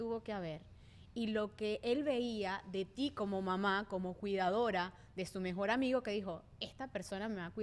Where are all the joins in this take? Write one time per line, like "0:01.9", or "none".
none